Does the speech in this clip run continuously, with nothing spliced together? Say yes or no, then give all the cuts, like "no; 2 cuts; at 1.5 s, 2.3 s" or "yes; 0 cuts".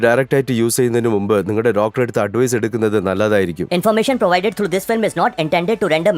no; 1 cut; at 3.6 s